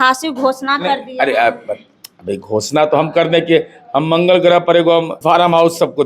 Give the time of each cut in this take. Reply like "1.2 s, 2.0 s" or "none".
5.1 s